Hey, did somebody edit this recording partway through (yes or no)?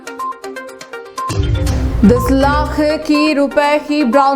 yes